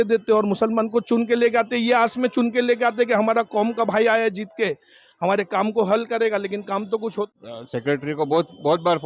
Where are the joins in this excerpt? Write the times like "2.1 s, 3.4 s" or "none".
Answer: 7.3 s